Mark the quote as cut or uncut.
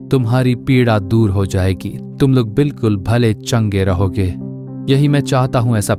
uncut